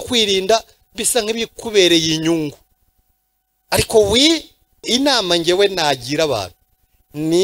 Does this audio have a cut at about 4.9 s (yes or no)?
yes